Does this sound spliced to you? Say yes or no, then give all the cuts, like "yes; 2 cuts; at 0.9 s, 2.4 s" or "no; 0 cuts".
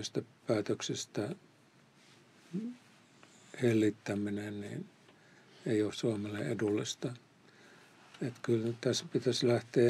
no; 0 cuts